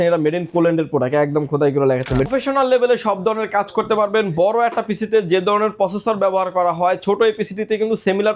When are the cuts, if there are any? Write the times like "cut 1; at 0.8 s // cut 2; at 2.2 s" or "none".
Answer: cut 1; at 2.3 s